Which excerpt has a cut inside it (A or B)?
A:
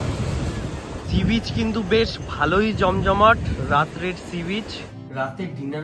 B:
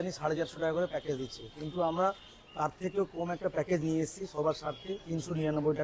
A